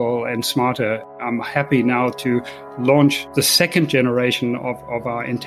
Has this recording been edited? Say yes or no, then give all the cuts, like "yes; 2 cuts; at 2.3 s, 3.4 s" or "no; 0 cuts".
yes; 1 cut; at 1.1 s